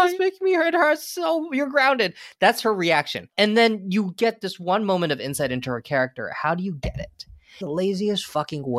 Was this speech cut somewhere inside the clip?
yes; 2 cuts; at 3.2 s, 7.6 s

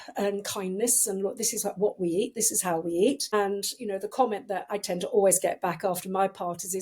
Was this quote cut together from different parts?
yes; 1 cut; at 3.3 s

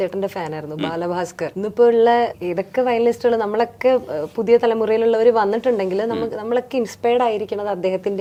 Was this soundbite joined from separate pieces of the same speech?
no; 0 cuts

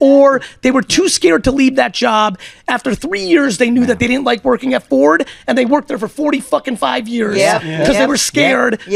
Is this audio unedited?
yes; 0 cuts

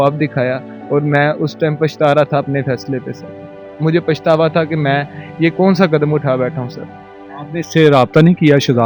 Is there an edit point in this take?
no; 0 cuts

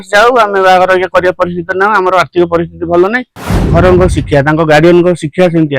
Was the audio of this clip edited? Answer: yes; 1 cut; at 3.6 s

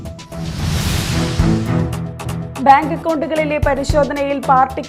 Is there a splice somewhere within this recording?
no; 0 cuts

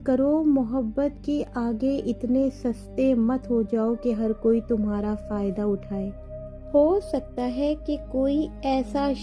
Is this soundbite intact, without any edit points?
no; 1 cut; at 6.2 s

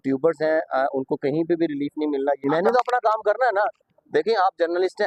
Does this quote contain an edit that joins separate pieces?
yes; 1 cut; at 2.3 s

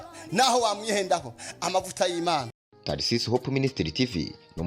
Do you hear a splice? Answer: yes; 1 cut; at 2.5 s

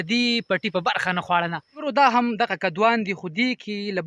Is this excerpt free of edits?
no; 1 cut; at 1.7 s

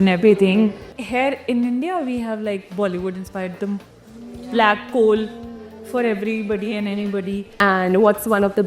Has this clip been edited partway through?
yes; 2 cuts; at 0.9 s, 7.5 s

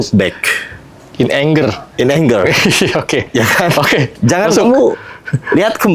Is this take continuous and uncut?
yes; 0 cuts

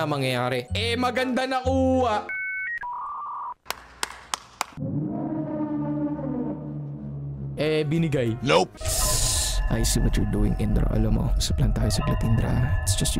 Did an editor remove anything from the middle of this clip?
yes; 1 cut; at 7.5 s

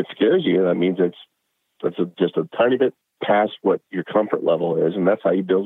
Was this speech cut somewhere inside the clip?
no; 0 cuts

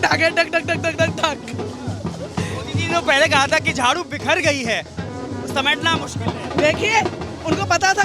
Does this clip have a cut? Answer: no; 0 cuts

